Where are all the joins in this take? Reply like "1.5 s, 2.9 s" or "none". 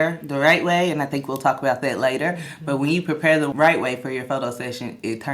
3.5 s

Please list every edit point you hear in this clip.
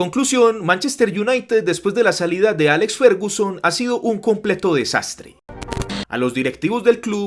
5.7 s

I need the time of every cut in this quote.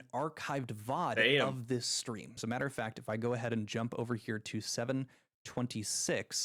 2.3 s

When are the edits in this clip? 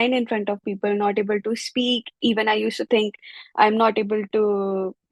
none

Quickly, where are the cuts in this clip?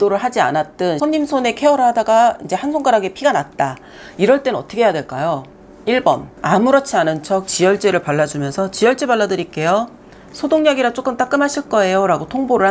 1.0 s, 6.3 s

